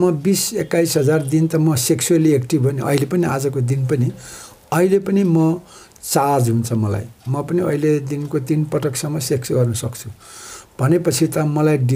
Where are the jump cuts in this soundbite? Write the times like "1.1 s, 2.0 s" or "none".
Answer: none

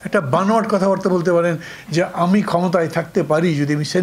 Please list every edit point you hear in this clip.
none

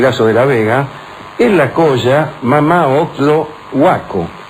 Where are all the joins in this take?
none

